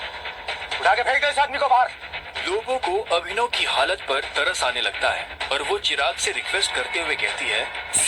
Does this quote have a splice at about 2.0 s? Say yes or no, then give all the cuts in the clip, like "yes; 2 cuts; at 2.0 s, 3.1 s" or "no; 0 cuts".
no; 0 cuts